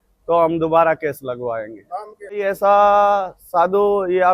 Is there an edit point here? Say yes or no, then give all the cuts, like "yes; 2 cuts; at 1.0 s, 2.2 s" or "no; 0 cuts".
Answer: yes; 1 cut; at 2.3 s